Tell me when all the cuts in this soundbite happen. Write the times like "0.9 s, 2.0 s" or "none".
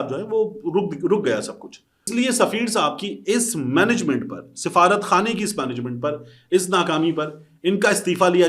2.1 s